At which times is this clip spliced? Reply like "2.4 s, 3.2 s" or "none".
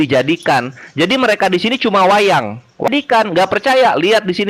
2.9 s